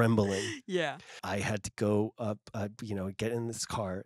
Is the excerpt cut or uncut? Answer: cut